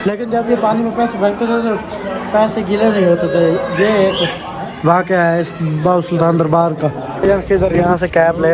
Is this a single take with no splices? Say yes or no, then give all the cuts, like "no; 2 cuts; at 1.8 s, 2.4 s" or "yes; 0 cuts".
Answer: no; 1 cut; at 7.2 s